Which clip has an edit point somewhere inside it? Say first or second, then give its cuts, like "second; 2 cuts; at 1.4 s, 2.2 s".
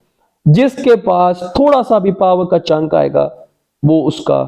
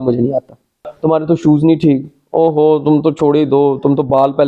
second; 1 cut; at 0.9 s